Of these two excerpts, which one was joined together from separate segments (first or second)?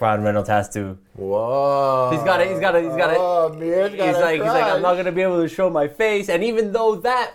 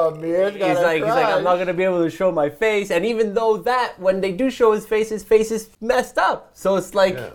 second